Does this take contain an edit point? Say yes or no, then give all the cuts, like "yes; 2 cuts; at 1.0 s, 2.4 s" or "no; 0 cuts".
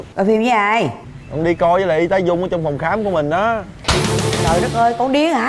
no; 0 cuts